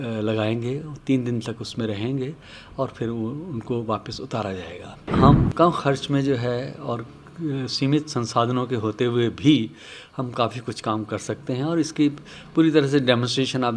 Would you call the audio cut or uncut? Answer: cut